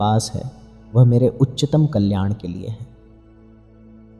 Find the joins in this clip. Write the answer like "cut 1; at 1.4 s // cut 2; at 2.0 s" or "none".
none